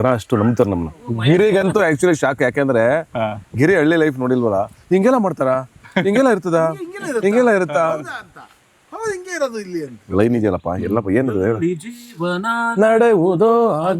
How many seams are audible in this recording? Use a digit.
2